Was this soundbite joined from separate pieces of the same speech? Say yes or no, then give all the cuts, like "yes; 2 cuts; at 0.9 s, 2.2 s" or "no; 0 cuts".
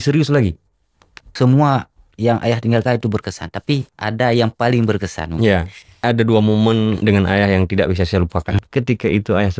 yes; 4 cuts; at 1.2 s, 6.0 s, 7.0 s, 8.6 s